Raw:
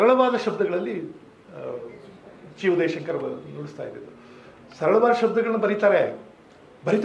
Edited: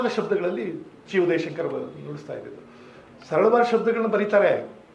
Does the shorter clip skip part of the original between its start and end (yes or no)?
yes